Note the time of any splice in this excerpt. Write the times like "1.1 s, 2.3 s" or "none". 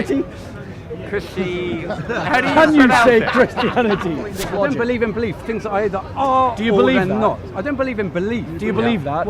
4.4 s